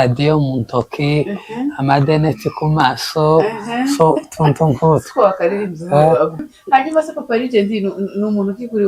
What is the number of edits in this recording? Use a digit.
1